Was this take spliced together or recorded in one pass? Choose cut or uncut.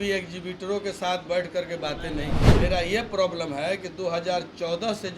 cut